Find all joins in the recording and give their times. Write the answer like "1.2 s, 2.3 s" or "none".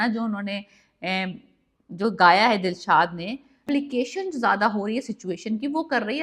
3.7 s